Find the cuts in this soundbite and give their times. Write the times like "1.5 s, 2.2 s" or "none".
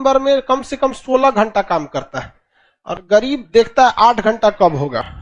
none